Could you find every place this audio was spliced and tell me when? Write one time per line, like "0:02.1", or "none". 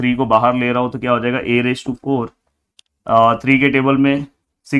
none